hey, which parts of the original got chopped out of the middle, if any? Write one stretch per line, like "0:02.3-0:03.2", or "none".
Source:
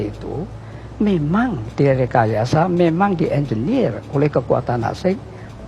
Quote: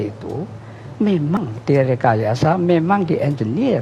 0:01.4-0:01.5